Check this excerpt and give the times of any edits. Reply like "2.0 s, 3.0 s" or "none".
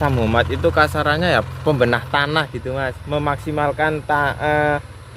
none